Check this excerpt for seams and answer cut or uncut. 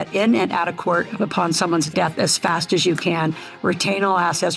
cut